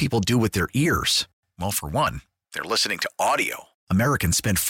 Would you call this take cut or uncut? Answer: uncut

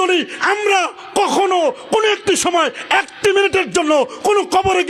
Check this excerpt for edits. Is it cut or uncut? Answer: uncut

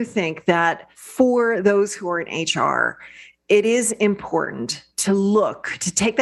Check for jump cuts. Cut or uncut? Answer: uncut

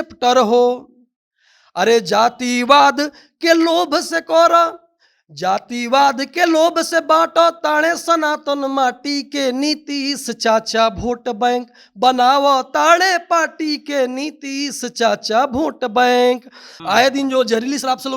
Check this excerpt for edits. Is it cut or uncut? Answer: cut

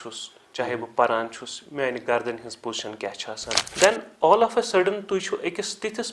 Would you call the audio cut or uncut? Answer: cut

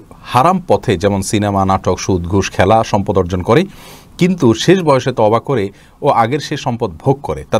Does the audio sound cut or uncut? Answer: uncut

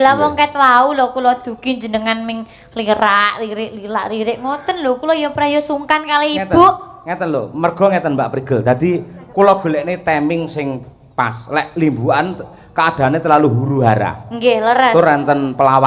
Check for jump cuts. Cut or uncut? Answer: uncut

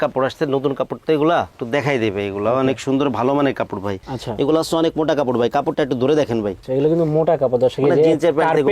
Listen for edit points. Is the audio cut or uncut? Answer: uncut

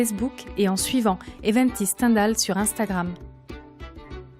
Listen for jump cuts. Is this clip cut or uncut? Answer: cut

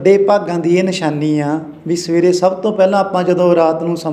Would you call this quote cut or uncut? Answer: uncut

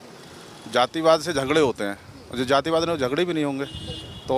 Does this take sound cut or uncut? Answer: uncut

